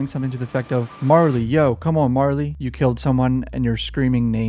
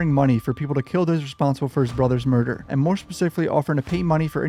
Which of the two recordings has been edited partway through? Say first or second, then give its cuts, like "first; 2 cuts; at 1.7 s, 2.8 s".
first; 1 cut; at 2.6 s